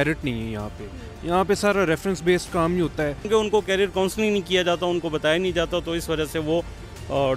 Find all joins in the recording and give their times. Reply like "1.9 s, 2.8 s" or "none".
3.3 s